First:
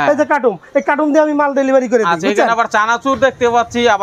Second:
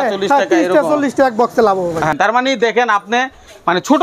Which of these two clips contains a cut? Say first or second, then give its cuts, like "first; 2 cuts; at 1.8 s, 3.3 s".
second; 1 cut; at 2.1 s